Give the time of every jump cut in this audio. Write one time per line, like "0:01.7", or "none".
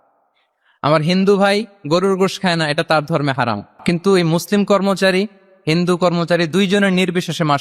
0:03.8